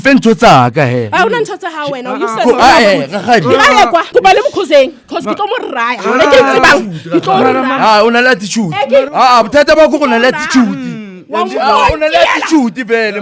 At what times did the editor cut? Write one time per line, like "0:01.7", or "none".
0:04.1